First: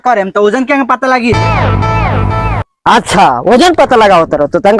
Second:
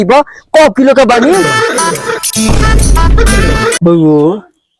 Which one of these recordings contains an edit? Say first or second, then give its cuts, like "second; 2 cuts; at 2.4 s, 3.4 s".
second; 1 cut; at 3.8 s